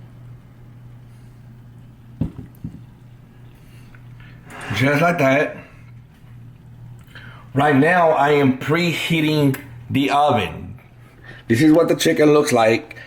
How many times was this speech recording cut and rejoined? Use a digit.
0